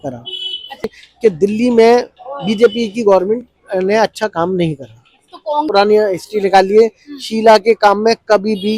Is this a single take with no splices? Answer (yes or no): no